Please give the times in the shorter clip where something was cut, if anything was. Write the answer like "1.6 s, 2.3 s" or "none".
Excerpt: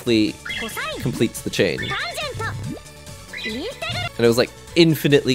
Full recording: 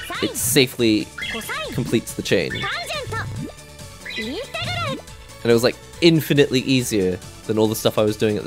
4.1 s